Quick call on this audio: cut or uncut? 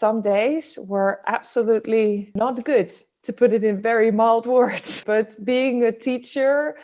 cut